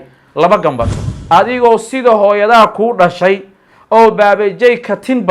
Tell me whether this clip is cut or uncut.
cut